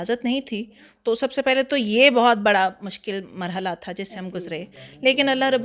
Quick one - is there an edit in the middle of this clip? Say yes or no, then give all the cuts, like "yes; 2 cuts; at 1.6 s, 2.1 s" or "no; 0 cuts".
no; 0 cuts